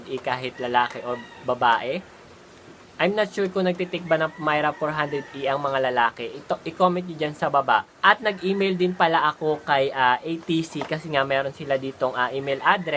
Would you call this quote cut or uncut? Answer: uncut